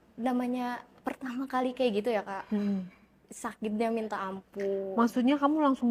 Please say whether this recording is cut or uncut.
uncut